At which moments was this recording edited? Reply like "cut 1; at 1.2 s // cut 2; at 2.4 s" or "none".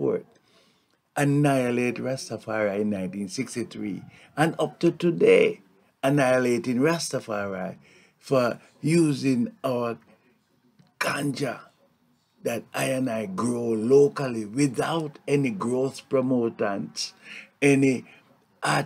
none